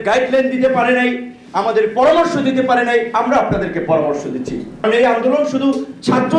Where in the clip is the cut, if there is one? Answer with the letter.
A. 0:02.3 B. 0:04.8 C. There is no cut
B